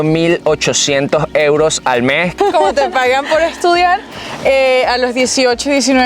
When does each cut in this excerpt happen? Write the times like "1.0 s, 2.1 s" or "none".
2.3 s

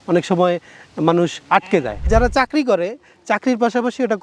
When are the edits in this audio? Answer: 2.1 s

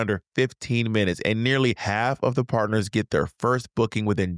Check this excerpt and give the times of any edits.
1.8 s

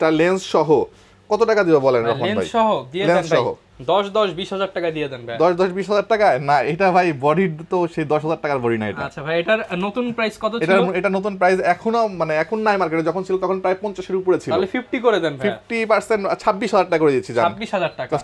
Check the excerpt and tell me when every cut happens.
none

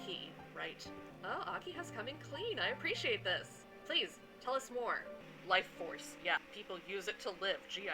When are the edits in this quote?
1.1 s, 5.2 s

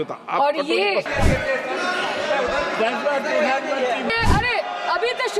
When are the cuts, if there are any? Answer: 1.1 s, 4.1 s

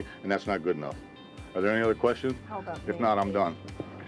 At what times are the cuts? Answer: none

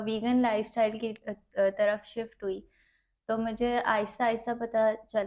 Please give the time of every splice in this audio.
none

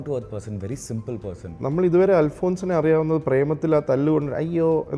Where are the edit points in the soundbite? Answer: 1.6 s

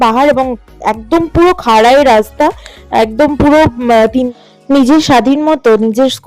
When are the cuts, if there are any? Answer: 4.3 s

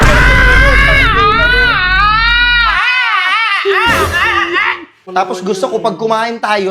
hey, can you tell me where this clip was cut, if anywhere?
4.9 s

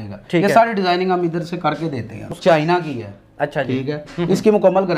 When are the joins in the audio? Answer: 2.3 s

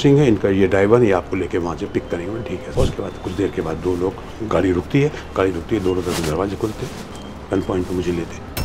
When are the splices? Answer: 2.7 s

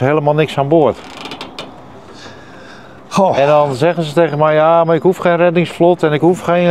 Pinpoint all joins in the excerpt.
none

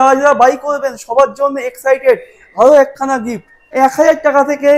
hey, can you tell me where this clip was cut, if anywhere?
3.7 s

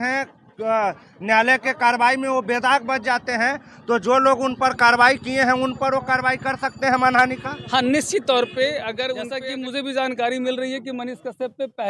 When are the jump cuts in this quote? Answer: 9.3 s

